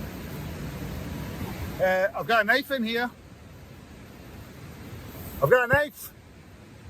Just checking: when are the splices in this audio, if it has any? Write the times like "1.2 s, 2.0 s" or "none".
1.4 s